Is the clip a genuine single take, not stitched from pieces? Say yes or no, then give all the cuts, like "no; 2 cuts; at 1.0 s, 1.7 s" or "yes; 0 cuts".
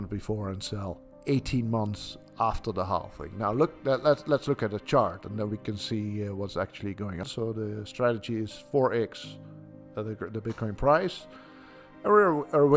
no; 1 cut; at 7.2 s